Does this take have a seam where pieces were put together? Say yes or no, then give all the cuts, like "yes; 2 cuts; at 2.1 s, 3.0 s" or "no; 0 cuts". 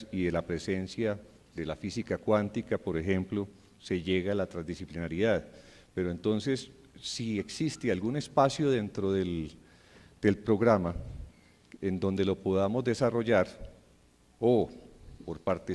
no; 0 cuts